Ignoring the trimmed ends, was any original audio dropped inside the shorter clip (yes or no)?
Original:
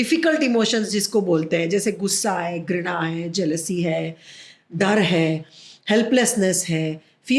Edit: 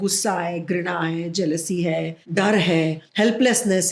yes